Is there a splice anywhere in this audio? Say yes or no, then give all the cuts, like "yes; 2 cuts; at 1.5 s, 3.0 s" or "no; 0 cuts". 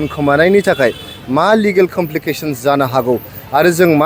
no; 0 cuts